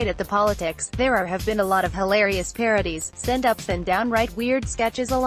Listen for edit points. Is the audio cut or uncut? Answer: uncut